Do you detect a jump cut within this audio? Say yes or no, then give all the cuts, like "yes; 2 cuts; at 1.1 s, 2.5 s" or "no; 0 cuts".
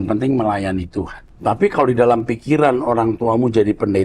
yes; 1 cut; at 1.2 s